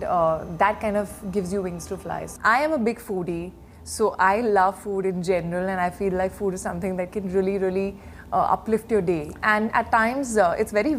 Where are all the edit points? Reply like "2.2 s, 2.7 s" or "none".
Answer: 2.3 s, 9.4 s